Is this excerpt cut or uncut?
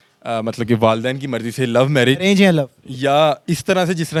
uncut